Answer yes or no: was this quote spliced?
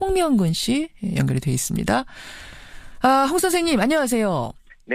yes